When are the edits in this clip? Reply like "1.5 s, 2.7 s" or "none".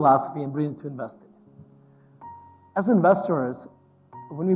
none